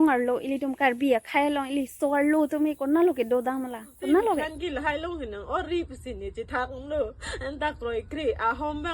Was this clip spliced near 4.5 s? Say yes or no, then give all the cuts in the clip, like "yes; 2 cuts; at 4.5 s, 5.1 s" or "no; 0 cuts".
yes; 1 cut; at 4.5 s